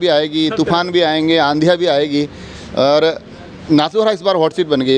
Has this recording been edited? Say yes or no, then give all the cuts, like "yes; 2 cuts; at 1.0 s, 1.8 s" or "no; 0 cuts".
no; 0 cuts